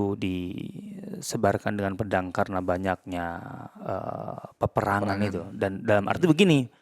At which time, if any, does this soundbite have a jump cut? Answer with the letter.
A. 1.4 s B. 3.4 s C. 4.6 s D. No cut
D